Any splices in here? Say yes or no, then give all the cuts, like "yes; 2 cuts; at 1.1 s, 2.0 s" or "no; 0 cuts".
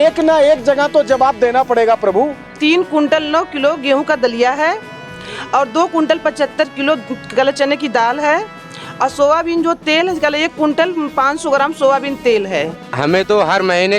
yes; 2 cuts; at 2.5 s, 12.8 s